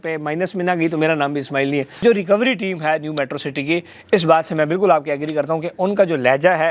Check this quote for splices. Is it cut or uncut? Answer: cut